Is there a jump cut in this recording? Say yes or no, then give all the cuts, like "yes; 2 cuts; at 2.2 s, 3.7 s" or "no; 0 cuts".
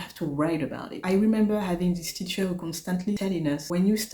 yes; 1 cut; at 3.2 s